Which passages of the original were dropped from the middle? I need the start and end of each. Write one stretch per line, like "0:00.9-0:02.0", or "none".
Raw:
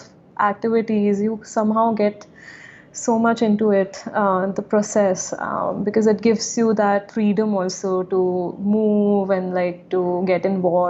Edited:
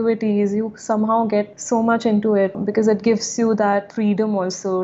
0:02.2-0:02.9
0:03.9-0:05.8